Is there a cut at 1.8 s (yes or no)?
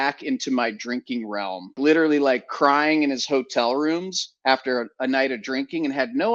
yes